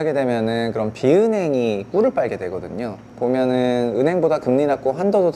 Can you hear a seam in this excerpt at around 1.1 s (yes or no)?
no